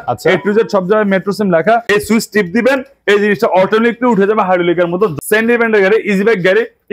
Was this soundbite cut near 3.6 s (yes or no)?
no